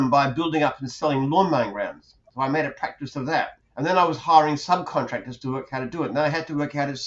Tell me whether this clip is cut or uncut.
cut